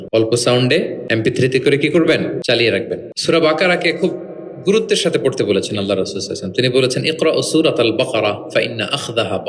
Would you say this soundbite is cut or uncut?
cut